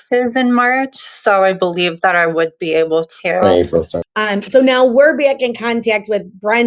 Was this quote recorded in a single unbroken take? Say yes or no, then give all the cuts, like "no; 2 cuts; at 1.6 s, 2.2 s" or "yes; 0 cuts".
no; 1 cut; at 4.0 s